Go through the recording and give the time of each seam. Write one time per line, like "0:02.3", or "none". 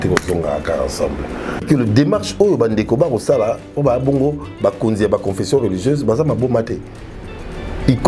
0:01.6